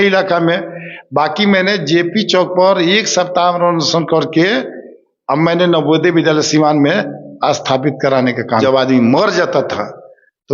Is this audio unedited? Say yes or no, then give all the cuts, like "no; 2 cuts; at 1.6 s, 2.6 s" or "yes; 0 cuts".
no; 1 cut; at 8.6 s